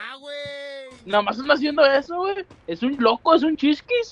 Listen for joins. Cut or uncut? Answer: cut